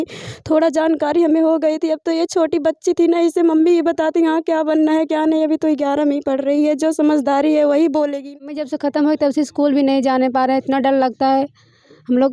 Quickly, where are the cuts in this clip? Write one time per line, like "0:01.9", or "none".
0:08.6

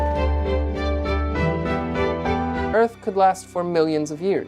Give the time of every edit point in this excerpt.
0:02.7

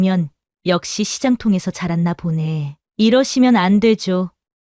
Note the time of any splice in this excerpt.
0:02.8

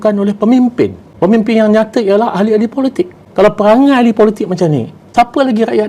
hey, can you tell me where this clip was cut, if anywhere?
0:01.0
0:03.2
0:05.0

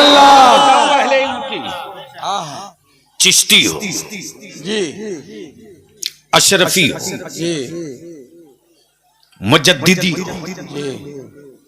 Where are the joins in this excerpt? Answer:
0:02.8

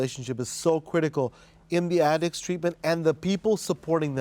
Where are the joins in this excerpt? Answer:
none

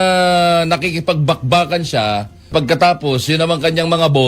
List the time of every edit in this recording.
0:02.5

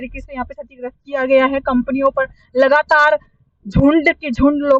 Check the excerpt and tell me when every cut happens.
none

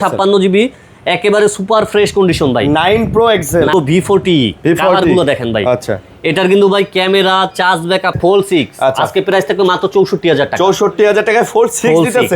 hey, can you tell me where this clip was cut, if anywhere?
0:03.7
0:08.1

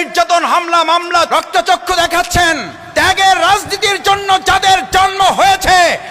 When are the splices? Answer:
0:01.3
0:02.7

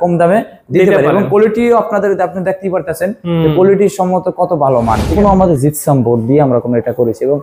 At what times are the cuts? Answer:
0:05.1

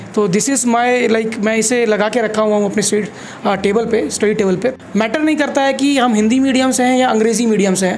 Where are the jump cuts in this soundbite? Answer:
0:04.7

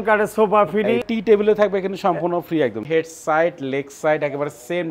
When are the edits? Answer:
0:01.0
0:02.8

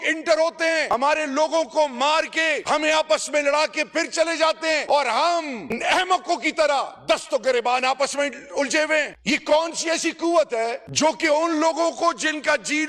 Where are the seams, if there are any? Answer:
0:00.9
0:02.6
0:04.8
0:09.1

